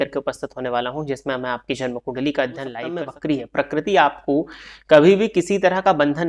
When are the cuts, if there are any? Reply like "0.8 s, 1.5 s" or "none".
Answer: 2.8 s